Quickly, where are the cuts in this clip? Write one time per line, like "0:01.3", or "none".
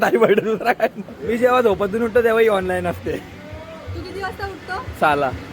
0:01.1